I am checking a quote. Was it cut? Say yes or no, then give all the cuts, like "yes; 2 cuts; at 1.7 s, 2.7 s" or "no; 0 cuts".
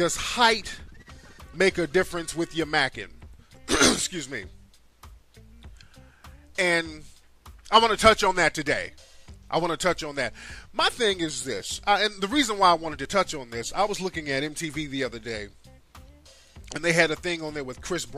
no; 0 cuts